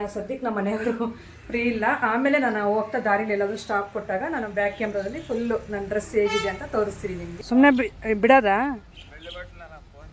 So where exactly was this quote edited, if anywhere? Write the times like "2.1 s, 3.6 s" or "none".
7.3 s